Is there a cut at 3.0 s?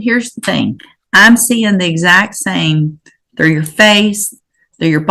no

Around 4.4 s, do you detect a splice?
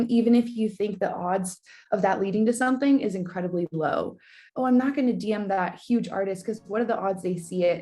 yes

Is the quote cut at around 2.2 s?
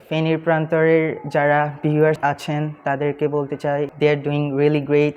yes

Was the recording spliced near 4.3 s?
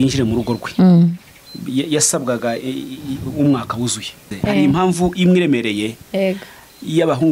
yes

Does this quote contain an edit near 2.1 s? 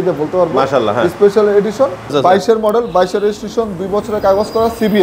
yes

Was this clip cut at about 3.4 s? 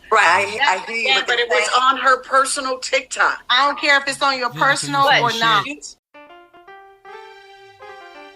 no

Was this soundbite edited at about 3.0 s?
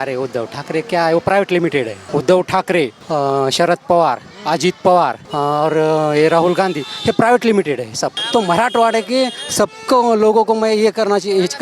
yes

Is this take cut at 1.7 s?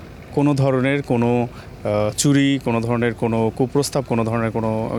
no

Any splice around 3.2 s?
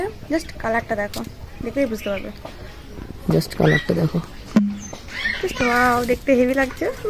no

